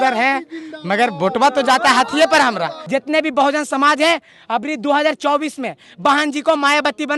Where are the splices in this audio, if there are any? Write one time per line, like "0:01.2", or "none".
0:02.7